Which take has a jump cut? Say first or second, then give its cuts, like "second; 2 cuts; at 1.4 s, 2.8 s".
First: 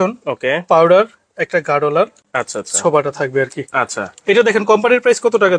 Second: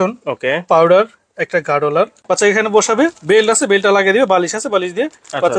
second; 1 cut; at 2.2 s